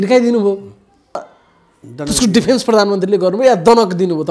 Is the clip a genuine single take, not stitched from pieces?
no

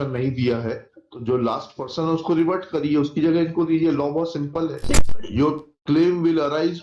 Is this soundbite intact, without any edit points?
no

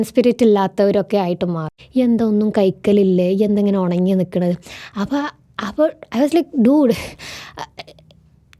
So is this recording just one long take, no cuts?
no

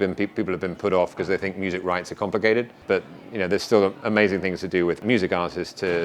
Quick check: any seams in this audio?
yes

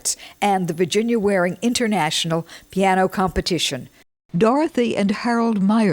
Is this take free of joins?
no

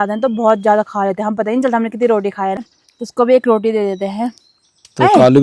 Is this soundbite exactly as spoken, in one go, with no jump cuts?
yes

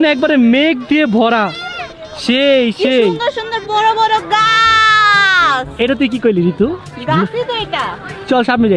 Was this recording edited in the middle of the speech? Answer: no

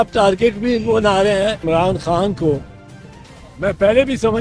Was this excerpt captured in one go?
no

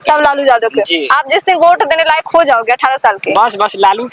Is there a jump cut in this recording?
no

